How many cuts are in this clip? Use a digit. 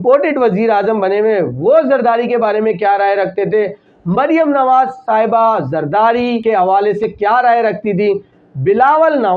1